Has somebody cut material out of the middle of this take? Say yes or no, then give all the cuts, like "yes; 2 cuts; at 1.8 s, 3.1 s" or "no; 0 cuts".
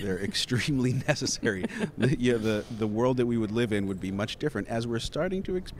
no; 0 cuts